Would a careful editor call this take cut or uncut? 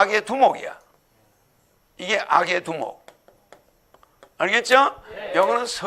uncut